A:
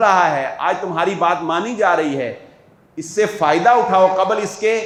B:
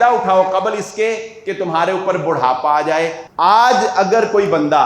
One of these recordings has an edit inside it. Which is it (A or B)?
B